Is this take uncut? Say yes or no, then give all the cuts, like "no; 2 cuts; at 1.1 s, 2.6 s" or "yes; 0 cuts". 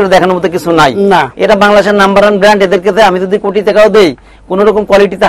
yes; 0 cuts